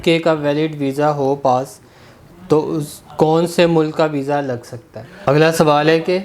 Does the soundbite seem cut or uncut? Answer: cut